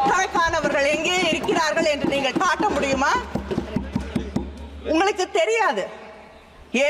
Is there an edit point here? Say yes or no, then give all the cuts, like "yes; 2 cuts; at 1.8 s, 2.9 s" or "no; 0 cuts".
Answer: no; 0 cuts